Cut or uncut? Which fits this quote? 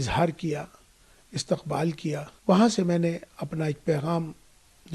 cut